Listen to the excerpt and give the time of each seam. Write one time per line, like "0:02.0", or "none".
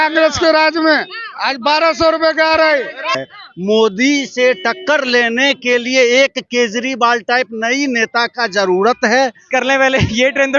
0:03.2
0:09.4